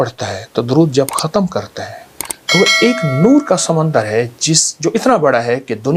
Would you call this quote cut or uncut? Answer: uncut